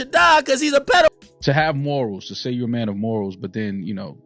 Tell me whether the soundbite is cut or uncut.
cut